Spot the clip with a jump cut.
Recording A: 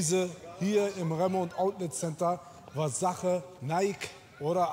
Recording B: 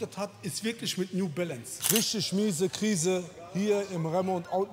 B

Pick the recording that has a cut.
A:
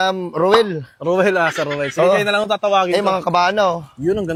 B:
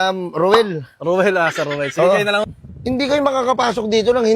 B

